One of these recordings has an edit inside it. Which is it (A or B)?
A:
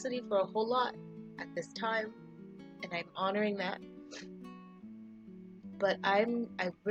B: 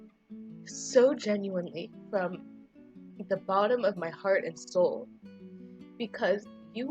B